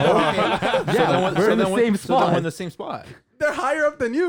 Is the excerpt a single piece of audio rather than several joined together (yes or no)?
yes